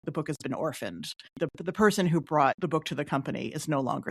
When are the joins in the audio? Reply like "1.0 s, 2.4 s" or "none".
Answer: 1.3 s, 2.6 s

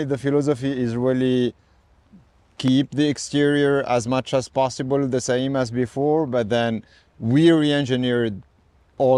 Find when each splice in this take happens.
none

